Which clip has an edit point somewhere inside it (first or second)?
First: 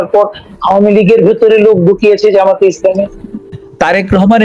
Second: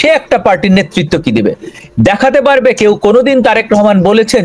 first